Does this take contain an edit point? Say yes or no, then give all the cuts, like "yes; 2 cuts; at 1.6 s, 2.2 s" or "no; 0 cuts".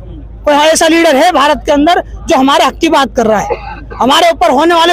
no; 0 cuts